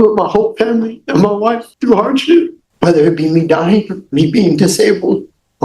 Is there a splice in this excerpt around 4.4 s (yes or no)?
no